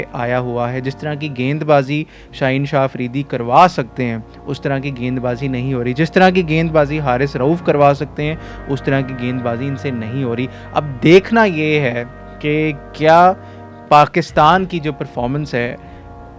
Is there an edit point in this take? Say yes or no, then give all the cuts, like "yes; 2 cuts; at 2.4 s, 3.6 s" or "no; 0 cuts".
no; 0 cuts